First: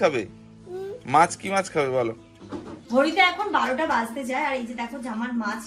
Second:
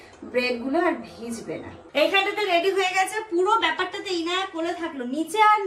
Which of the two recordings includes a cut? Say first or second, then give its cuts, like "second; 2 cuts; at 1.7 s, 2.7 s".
first; 1 cut; at 2.7 s